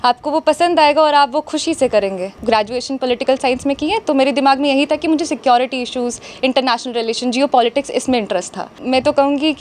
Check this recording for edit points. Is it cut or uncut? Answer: cut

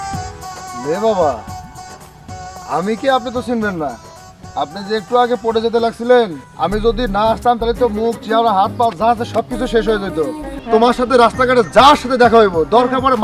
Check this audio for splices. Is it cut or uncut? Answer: cut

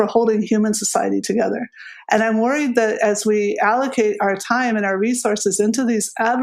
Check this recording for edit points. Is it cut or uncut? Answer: uncut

